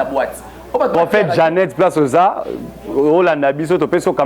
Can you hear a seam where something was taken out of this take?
yes; 1 cut; at 0.9 s

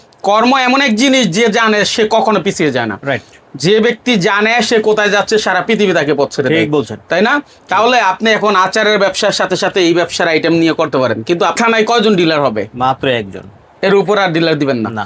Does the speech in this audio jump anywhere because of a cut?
yes; 1 cut; at 11.5 s

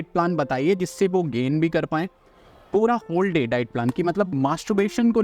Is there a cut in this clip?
yes; 1 cut; at 4.3 s

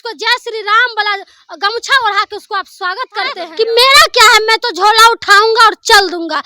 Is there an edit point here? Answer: yes; 1 cut; at 3.5 s

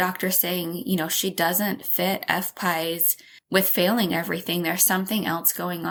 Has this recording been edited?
no; 0 cuts

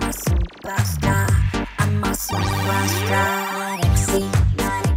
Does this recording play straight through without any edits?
yes; 0 cuts

